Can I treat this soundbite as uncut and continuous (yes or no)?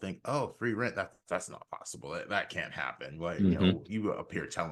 yes